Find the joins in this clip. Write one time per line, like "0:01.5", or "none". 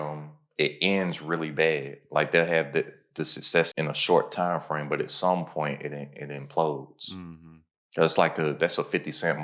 0:03.7